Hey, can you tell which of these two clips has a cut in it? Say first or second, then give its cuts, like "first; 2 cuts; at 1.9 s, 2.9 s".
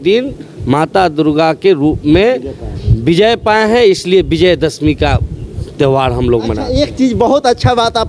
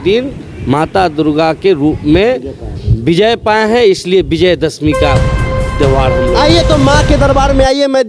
second; 1 cut; at 6.4 s